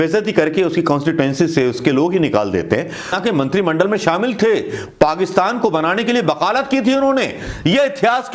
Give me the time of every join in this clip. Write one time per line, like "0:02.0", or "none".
0:03.2